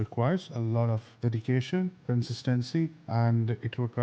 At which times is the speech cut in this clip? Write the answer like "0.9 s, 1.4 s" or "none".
1.1 s, 2.0 s, 3.0 s